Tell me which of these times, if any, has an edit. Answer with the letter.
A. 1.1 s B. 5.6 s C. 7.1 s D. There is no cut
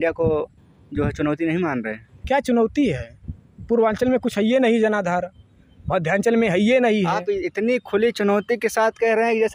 D